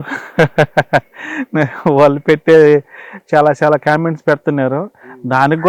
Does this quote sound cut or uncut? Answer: uncut